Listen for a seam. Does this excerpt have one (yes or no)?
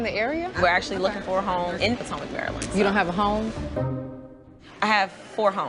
yes